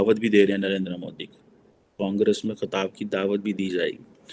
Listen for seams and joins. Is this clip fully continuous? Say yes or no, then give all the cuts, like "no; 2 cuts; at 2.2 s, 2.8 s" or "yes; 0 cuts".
yes; 0 cuts